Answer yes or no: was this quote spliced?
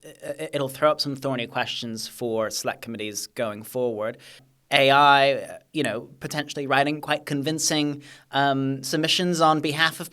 yes